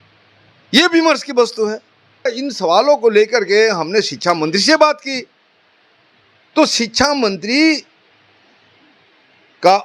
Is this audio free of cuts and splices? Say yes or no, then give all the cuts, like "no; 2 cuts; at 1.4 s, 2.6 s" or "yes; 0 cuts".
no; 1 cut; at 2.3 s